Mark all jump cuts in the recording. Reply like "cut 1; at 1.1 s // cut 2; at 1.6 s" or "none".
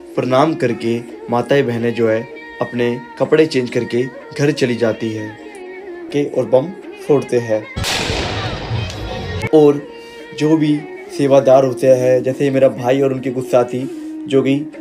cut 1; at 6.1 s